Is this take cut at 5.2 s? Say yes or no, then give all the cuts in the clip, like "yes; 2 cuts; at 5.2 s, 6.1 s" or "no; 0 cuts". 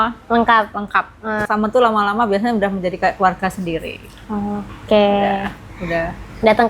no; 1 cut; at 1.5 s